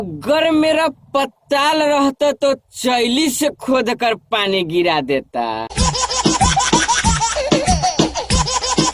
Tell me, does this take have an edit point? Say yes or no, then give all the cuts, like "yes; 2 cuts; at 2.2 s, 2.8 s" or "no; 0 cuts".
yes; 2 cuts; at 5.7 s, 8.0 s